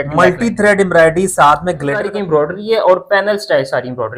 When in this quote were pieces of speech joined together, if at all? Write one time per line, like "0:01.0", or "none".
0:02.0